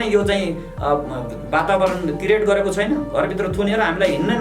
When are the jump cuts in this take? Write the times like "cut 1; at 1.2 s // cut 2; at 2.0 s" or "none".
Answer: none

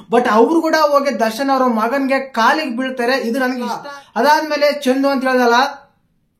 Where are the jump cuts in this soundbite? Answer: cut 1; at 3.8 s

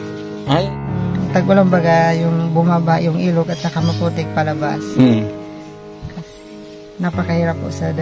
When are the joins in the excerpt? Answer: cut 1; at 1.0 s

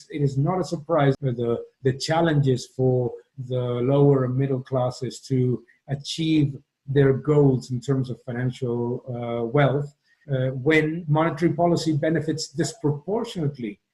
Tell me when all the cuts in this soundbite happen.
cut 1; at 1.2 s // cut 2; at 11.0 s

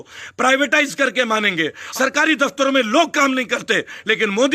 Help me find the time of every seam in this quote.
cut 1; at 1.8 s

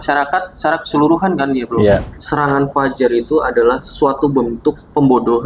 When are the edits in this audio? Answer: cut 1; at 2.0 s

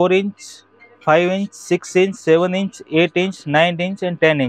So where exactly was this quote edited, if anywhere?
none

